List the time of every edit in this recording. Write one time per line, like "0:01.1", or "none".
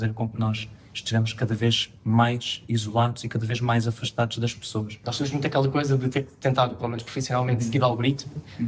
0:05.0